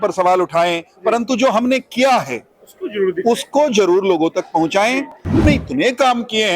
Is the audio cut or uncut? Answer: cut